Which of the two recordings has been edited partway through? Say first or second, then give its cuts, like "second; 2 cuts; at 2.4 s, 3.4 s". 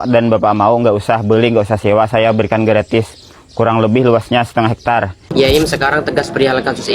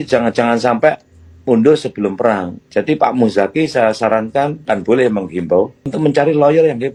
first; 1 cut; at 5.2 s